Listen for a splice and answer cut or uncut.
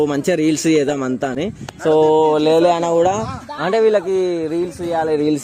uncut